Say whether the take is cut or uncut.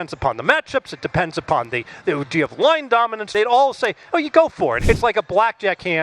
cut